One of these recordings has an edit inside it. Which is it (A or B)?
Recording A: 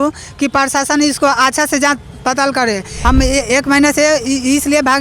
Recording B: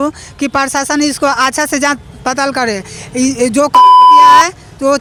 A